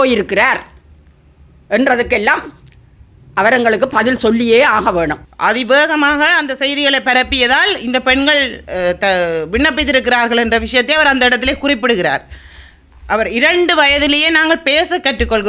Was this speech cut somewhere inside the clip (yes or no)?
yes